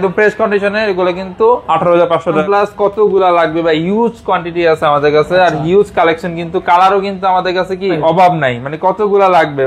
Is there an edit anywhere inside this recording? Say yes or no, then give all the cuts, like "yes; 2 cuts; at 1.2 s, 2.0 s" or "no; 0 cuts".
yes; 2 cuts; at 2.4 s, 8.0 s